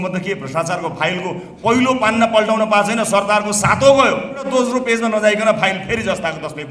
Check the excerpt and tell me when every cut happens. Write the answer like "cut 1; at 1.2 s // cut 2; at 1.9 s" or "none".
cut 1; at 4.5 s